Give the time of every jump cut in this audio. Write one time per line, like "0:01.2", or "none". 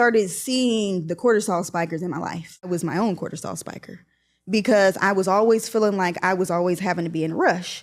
0:02.7